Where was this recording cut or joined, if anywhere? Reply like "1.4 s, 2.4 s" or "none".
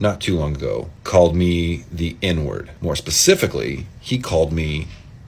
1.0 s, 2.7 s